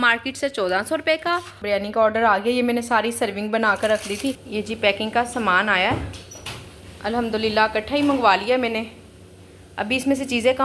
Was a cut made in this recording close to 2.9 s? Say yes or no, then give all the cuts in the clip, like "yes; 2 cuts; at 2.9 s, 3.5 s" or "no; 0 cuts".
no; 2 cuts; at 1.5 s, 4.4 s